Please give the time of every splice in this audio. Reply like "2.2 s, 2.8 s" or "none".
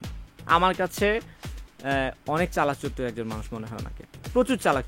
none

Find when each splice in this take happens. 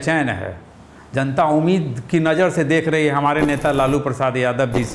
none

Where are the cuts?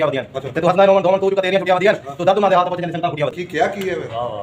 3.4 s

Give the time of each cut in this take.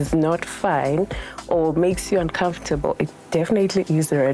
none

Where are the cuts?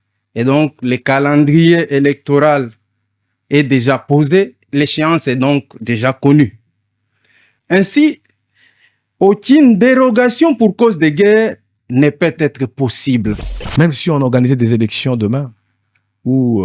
4.7 s, 13.5 s

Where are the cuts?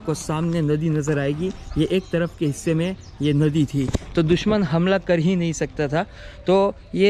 none

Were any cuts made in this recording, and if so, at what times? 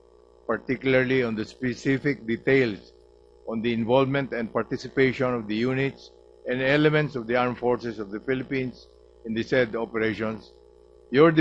5.7 s

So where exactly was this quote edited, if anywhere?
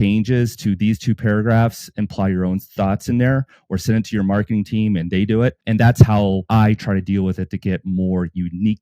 6.4 s

